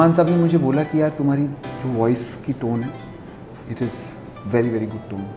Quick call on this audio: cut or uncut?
uncut